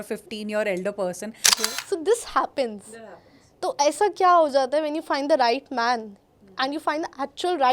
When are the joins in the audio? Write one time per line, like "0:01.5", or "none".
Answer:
0:01.4